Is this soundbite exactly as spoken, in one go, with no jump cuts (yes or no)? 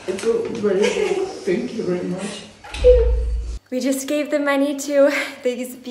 no